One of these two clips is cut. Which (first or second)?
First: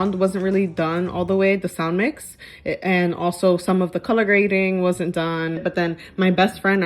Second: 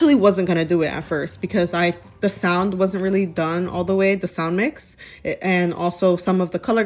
first